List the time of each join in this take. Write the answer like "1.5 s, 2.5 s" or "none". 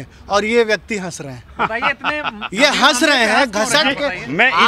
none